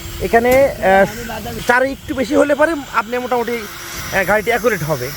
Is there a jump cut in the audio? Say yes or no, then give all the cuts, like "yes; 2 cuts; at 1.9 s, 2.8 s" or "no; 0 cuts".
yes; 1 cut; at 1.5 s